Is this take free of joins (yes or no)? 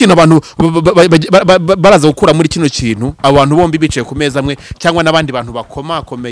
yes